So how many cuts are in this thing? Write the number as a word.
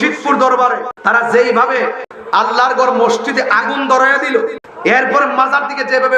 three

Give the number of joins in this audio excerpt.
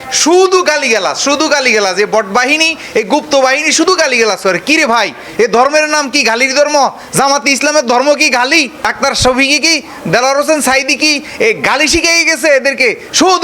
one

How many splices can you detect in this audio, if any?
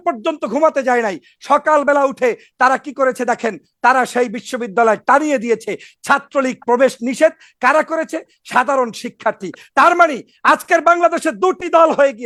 zero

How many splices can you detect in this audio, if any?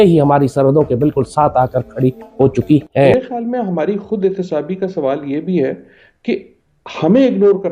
one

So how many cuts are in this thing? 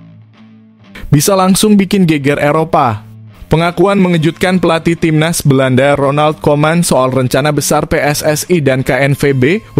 zero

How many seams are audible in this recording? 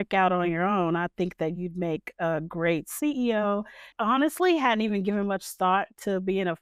one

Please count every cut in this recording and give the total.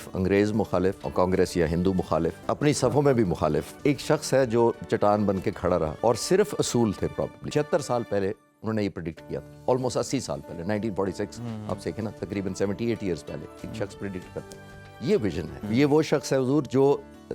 six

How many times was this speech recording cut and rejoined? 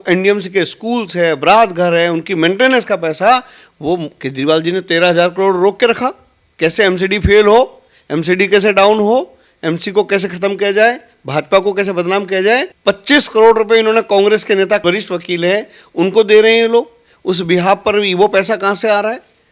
two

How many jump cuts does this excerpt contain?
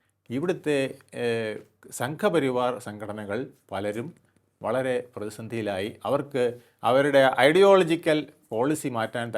zero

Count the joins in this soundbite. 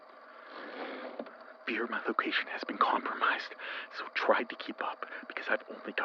one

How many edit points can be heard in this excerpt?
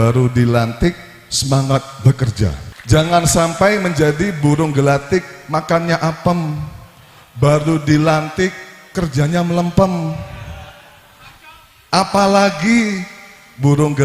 one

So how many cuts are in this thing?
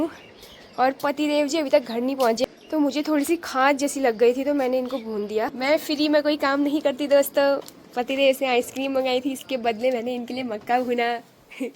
two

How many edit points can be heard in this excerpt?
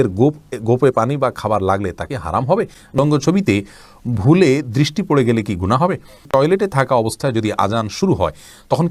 two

